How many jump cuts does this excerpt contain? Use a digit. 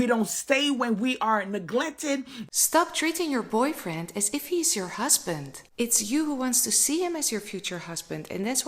1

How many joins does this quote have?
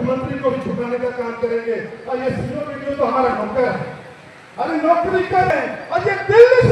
1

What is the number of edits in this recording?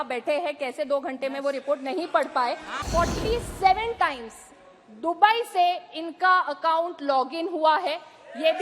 1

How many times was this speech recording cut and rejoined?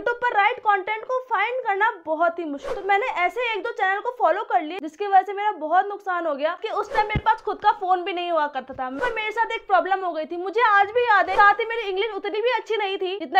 4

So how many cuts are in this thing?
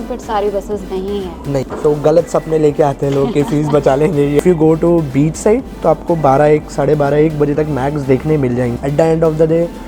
3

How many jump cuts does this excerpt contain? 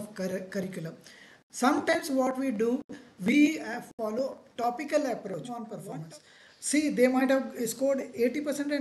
1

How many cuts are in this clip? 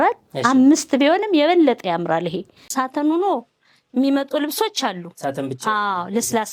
1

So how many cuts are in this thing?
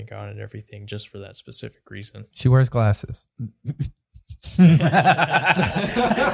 2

